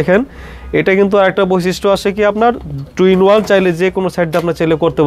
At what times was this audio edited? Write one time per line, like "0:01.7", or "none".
none